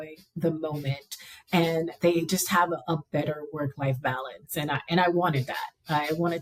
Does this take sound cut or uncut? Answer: uncut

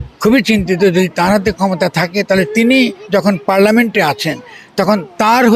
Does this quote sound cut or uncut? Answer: uncut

